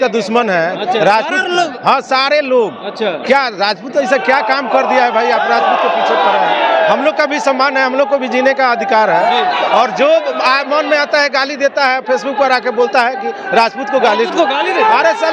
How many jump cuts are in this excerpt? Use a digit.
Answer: 0